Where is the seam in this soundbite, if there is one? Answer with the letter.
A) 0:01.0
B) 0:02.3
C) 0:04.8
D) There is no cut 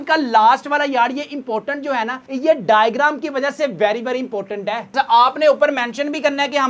C